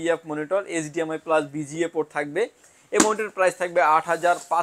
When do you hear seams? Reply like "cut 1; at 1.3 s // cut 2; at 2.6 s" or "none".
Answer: none